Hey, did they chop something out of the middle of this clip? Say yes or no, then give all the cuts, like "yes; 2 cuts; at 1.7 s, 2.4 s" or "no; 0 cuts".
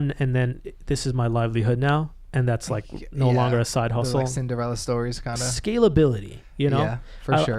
no; 0 cuts